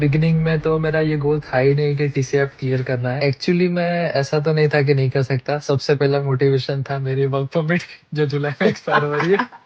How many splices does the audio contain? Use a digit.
1